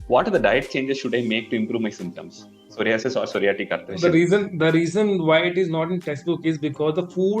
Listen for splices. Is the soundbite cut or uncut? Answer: cut